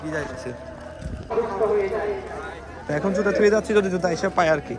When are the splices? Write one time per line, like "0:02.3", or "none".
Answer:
0:01.3
0:02.9